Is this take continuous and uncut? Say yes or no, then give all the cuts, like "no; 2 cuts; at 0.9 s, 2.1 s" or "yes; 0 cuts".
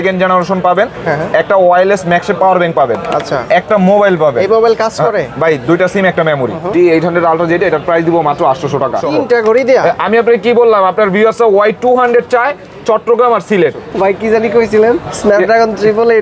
no; 3 cuts; at 6.6 s, 9.0 s, 13.8 s